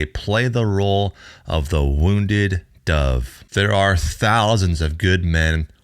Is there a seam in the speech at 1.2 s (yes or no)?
no